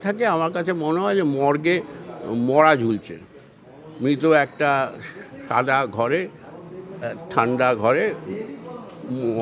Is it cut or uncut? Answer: uncut